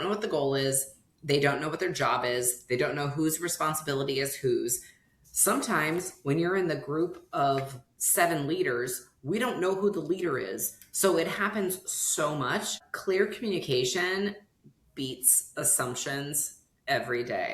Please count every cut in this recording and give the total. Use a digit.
1